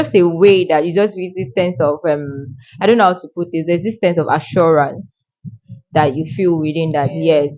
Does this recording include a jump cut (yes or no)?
no